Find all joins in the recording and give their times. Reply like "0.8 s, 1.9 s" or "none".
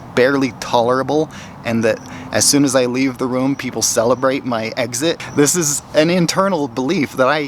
5.4 s